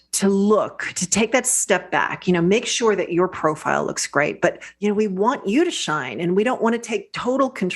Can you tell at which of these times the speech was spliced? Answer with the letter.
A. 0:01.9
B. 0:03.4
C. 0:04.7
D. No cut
C